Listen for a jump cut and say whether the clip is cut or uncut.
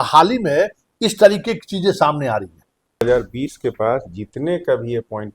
cut